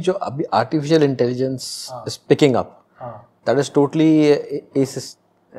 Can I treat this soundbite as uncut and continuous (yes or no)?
yes